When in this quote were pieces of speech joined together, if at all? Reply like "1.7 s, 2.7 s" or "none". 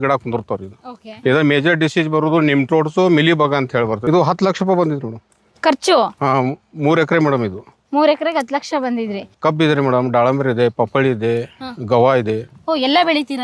1.3 s, 4.1 s, 9.2 s